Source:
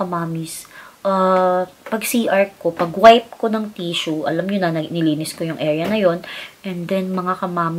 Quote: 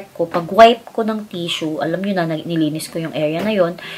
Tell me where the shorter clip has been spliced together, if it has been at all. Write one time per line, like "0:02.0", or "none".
none